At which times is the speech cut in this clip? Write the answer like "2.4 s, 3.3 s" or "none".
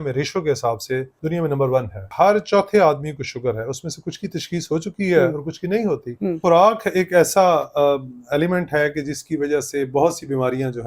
1.1 s, 2.1 s, 6.4 s